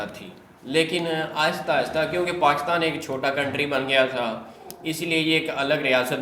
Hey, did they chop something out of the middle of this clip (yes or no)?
no